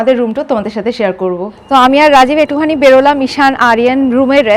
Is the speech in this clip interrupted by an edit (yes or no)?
yes